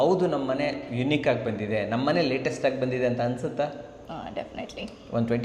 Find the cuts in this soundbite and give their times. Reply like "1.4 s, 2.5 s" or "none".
none